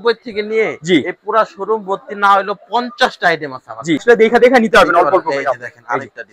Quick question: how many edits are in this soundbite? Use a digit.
1